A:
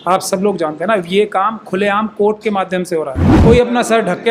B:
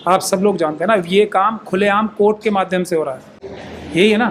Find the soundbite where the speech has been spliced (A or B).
A